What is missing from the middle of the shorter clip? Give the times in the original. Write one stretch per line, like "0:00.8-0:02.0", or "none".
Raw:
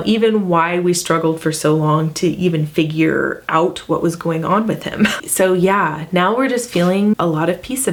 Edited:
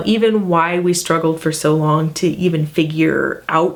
none